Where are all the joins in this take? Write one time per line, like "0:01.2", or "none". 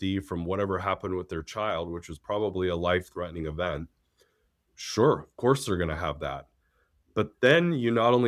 none